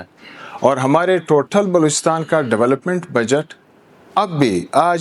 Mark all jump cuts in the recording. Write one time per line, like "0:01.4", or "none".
none

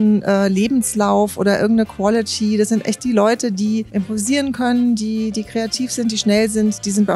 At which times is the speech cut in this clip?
none

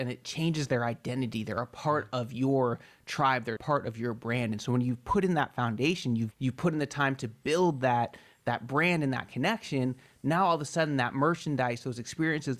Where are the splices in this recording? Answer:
0:03.6
0:06.3

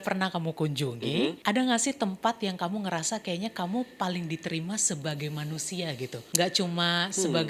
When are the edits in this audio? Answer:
0:01.4
0:06.2

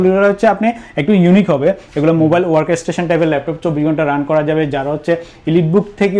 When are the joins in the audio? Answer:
none

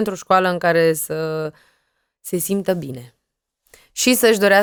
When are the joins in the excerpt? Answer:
none

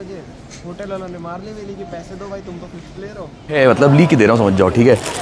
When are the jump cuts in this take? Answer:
0:03.5

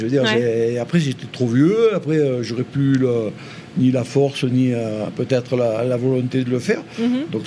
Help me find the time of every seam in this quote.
none

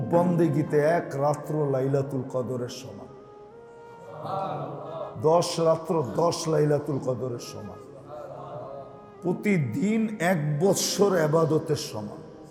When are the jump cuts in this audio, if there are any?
none

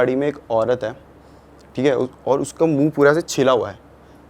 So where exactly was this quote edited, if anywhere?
none

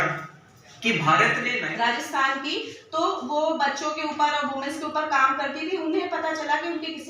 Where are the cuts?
0:01.6

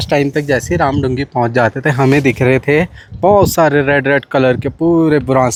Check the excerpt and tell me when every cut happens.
none

